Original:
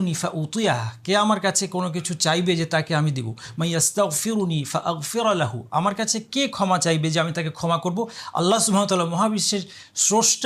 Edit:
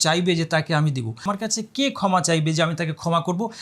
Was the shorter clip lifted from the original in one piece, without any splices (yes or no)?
no